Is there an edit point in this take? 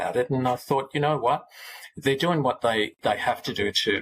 no; 0 cuts

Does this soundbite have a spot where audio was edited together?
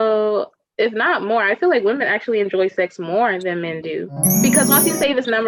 yes; 1 cut; at 4.2 s

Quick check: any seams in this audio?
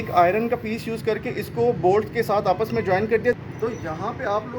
yes; 1 cut; at 3.5 s

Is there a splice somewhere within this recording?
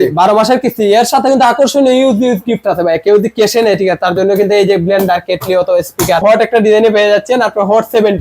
yes; 1 cut; at 6.2 s

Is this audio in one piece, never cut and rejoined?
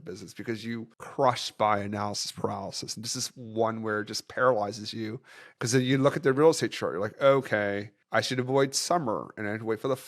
no; 1 cut; at 5.4 s

